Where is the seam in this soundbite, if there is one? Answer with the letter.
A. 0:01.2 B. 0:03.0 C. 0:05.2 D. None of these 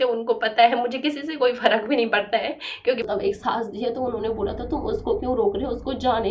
B